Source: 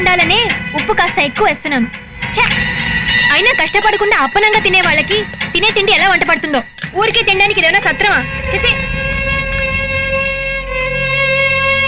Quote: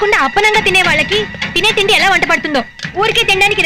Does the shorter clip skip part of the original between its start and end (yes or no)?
no